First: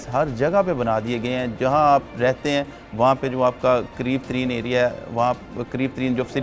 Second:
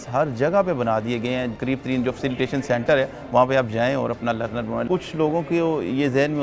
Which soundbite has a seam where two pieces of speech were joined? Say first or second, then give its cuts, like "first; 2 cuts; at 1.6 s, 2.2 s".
second; 2 cuts; at 1.5 s, 4.9 s